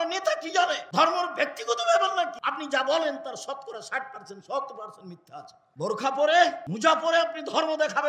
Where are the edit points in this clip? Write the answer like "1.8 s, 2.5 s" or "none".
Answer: 0.8 s, 2.4 s, 5.6 s, 6.7 s

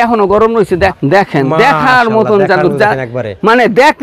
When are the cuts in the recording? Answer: 0.9 s

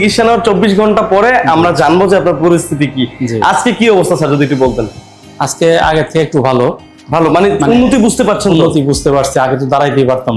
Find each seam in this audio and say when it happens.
none

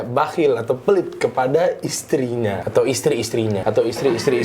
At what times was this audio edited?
2.6 s, 3.6 s

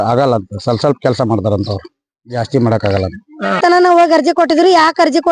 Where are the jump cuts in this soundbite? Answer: 3.6 s

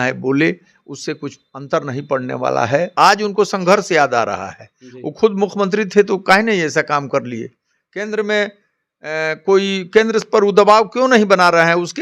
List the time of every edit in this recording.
2.9 s

